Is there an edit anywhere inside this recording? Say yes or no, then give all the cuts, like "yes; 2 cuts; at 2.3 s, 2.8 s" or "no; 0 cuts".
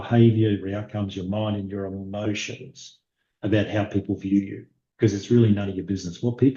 no; 0 cuts